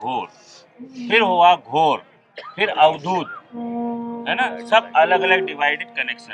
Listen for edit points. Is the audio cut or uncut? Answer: uncut